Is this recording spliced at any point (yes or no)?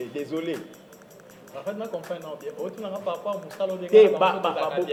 no